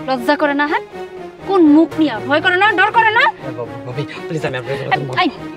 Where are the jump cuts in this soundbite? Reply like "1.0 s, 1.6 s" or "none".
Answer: none